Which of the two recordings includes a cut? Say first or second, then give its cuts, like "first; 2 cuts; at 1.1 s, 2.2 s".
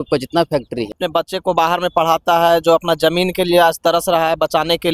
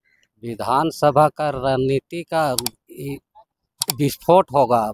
first; 1 cut; at 1.0 s